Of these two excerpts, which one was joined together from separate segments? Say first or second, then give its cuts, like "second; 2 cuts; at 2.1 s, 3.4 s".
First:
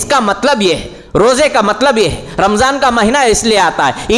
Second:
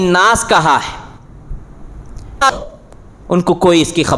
second; 1 cut; at 2.6 s